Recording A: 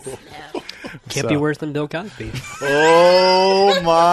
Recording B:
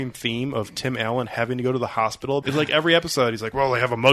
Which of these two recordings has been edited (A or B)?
B